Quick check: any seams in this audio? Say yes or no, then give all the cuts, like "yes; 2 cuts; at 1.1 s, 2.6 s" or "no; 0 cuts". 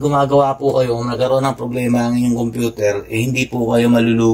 no; 0 cuts